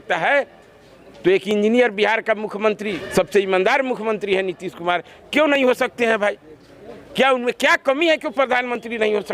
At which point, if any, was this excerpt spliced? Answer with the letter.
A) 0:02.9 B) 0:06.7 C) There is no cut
A